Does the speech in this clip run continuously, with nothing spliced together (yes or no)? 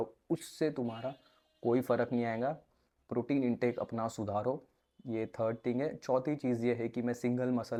yes